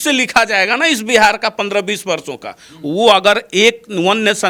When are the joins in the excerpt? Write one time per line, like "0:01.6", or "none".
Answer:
none